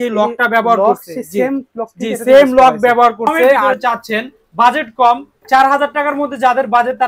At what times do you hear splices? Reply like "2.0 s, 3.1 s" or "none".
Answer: 3.7 s

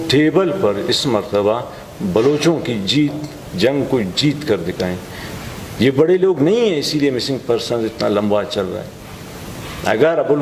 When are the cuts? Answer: none

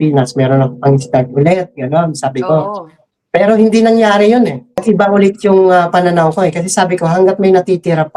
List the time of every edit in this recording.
4.8 s

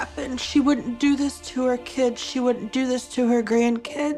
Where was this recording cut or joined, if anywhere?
none

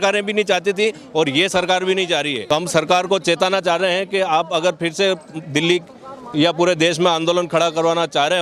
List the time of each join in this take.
2.4 s

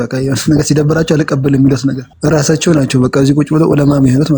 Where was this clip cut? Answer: 2.1 s

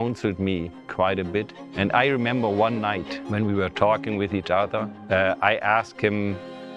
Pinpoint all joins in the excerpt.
1.6 s, 3.1 s, 4.9 s

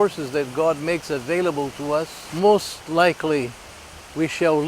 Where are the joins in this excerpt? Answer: 2.2 s

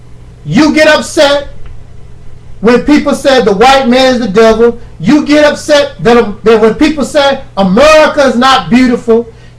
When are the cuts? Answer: 3.9 s

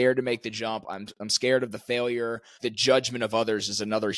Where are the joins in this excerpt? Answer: 2.6 s

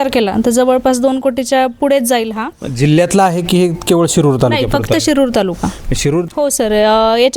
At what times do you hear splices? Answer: 6.2 s

